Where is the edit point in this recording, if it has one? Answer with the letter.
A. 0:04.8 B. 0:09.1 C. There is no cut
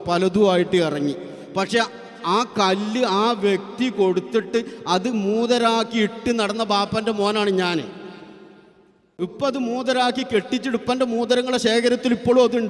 B